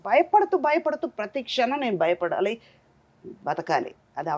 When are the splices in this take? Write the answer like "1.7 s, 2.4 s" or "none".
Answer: none